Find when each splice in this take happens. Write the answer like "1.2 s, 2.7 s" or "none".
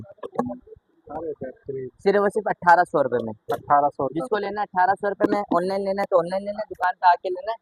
none